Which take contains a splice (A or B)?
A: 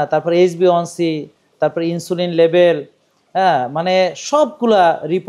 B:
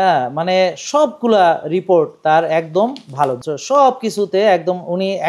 B